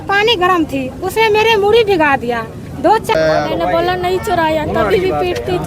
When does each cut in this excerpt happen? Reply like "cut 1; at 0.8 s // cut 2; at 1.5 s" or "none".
cut 1; at 3.1 s